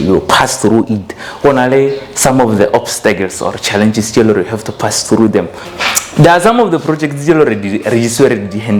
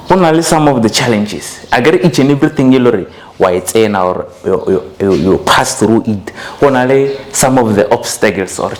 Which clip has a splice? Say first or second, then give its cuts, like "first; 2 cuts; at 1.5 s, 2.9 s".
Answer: first; 1 cut; at 5.7 s